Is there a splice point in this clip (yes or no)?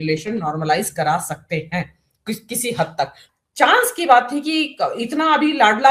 yes